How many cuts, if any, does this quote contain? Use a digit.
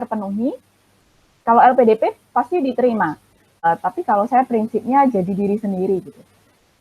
1